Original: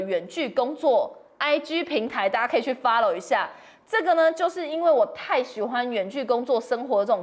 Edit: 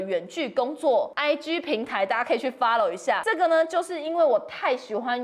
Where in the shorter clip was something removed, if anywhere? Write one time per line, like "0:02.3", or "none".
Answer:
0:01.1
0:03.2